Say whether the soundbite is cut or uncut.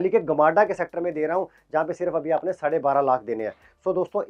uncut